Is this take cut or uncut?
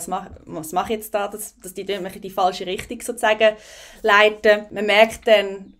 cut